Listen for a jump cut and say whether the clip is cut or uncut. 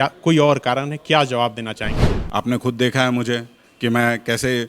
cut